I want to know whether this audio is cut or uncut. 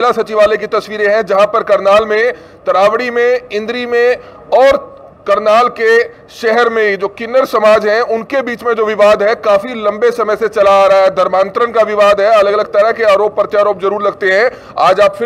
uncut